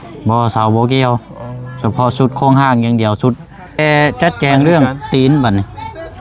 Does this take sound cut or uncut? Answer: cut